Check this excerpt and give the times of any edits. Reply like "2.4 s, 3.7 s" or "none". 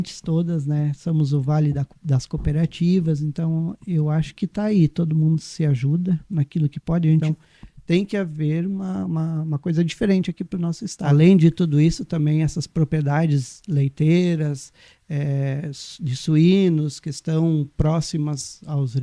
7.2 s, 10.9 s